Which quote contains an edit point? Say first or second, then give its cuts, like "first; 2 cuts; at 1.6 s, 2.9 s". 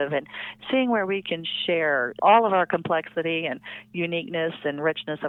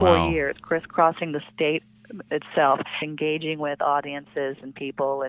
second; 2 cuts; at 2.2 s, 3.0 s